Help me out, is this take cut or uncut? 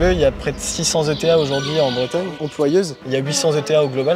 cut